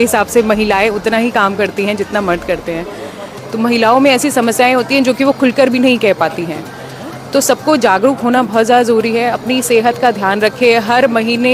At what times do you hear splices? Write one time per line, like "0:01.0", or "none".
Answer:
none